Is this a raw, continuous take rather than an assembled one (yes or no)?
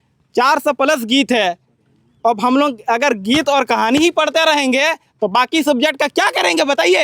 yes